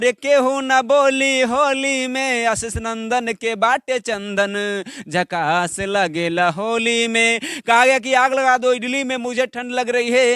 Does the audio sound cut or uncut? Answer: uncut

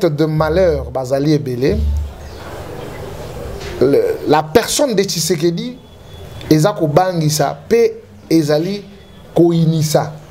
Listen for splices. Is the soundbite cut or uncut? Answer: uncut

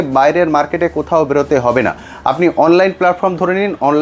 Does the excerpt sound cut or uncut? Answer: uncut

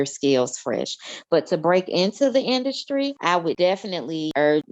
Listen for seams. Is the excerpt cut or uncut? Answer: cut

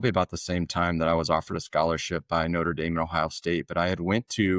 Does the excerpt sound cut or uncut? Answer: uncut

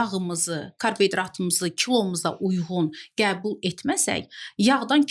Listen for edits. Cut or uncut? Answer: uncut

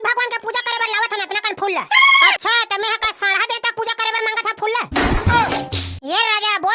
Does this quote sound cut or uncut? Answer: cut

